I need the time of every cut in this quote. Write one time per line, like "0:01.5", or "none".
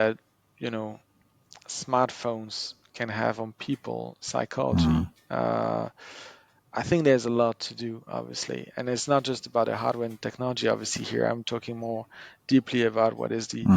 none